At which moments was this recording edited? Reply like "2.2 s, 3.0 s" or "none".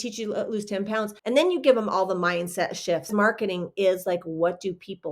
1.2 s, 3.1 s